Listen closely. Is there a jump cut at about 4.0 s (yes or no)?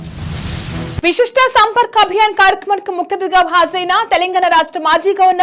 no